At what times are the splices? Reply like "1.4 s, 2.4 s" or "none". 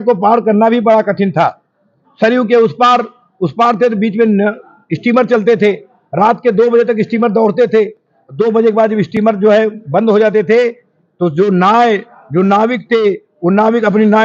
none